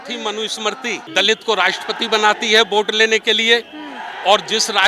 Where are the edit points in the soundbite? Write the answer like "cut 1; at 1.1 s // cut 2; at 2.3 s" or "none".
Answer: cut 1; at 1.0 s